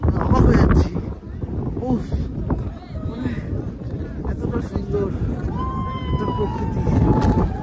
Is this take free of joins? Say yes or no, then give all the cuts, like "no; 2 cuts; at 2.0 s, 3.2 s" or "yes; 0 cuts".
yes; 0 cuts